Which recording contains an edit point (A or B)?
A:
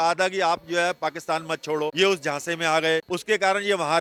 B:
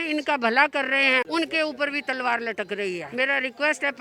B